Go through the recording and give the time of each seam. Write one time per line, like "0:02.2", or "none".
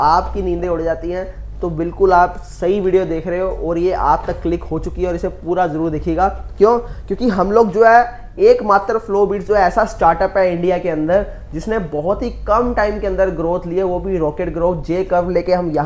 none